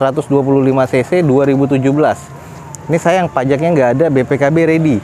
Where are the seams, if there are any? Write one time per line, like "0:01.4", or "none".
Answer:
none